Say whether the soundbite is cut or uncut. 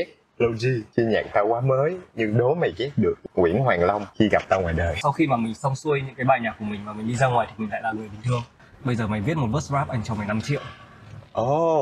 cut